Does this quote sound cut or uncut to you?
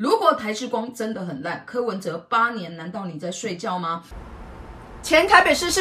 cut